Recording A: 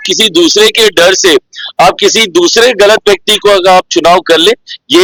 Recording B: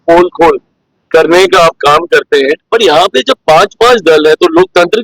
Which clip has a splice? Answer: B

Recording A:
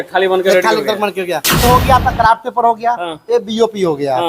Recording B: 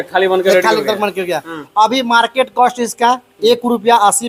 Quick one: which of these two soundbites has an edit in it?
A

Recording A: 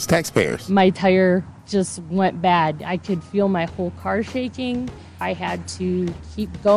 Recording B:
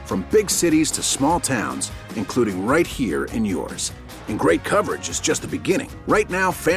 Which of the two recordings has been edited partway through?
A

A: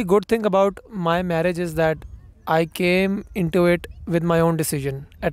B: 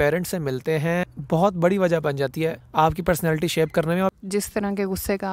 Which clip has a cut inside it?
B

